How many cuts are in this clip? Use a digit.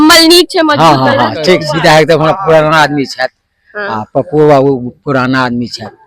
1